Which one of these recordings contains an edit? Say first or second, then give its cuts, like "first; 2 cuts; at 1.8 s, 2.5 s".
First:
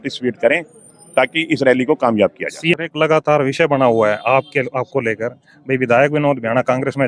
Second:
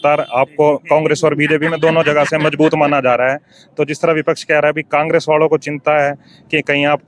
first; 1 cut; at 2.7 s